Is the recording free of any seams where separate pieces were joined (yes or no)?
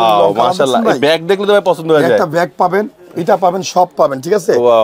yes